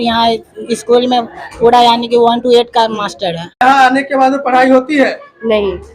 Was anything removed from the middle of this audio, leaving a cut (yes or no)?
yes